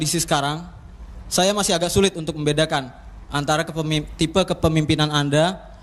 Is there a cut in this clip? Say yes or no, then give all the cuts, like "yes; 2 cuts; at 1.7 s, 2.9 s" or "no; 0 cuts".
no; 0 cuts